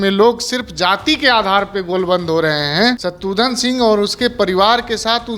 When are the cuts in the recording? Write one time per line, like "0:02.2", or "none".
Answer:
0:03.1